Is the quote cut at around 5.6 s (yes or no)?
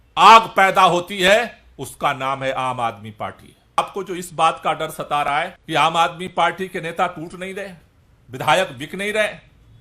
yes